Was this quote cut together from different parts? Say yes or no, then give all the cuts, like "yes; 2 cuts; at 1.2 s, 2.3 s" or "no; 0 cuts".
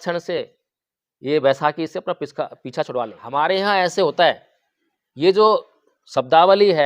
yes; 1 cut; at 3.2 s